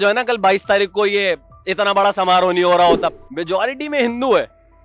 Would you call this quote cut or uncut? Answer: cut